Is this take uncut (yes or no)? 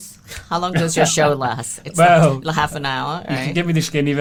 yes